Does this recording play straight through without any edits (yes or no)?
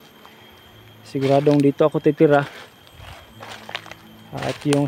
yes